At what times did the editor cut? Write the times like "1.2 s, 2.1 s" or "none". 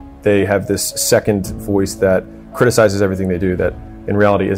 none